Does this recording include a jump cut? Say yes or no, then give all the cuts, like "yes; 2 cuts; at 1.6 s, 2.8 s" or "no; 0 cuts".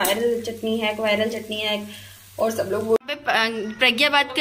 yes; 1 cut; at 3.1 s